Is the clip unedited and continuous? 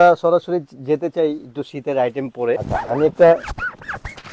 no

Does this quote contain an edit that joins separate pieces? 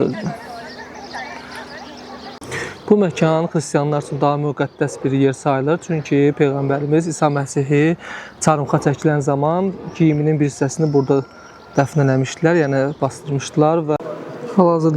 yes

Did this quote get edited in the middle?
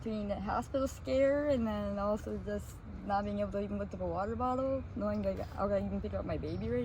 no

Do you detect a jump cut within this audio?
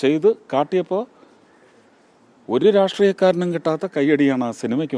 no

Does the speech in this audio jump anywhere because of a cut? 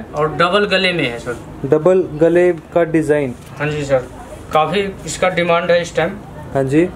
no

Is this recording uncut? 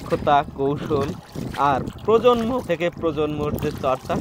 no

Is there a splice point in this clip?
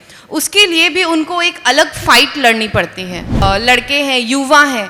yes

